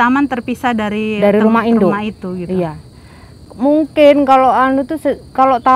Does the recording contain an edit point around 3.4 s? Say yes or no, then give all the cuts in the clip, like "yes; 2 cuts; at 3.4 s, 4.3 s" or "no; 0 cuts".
yes; 1 cut; at 3.4 s